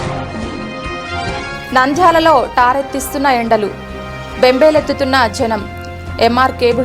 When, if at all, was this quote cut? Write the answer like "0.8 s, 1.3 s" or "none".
1.2 s